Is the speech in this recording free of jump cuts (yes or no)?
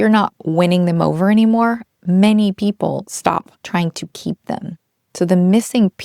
no